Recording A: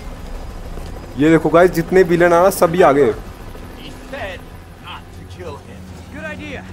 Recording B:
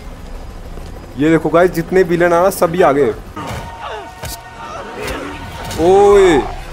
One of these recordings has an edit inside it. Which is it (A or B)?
B